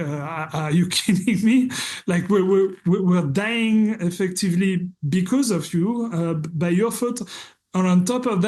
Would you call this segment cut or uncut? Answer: uncut